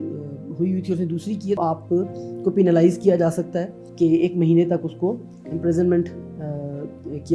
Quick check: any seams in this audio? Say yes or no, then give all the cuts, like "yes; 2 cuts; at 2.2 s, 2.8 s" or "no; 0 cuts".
yes; 2 cuts; at 1.6 s, 3.8 s